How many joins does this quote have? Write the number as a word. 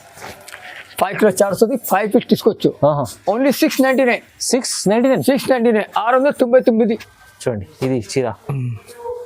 one